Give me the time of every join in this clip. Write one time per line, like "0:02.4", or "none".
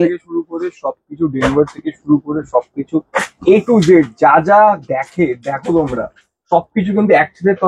none